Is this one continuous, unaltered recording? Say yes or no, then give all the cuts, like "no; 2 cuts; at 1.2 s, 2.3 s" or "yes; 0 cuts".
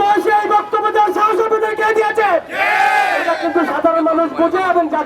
yes; 0 cuts